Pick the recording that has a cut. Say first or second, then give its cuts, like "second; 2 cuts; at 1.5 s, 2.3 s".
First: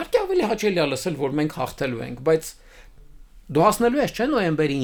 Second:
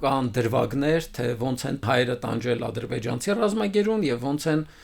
second; 1 cut; at 1.8 s